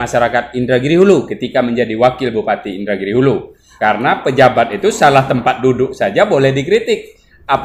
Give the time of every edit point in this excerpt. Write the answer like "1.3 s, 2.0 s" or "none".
3.6 s